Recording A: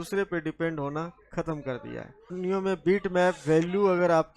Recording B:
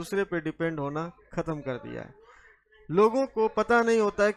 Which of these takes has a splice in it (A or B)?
A